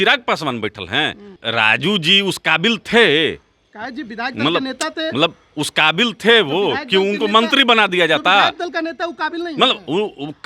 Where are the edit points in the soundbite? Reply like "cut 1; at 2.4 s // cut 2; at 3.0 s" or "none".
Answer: cut 1; at 1.4 s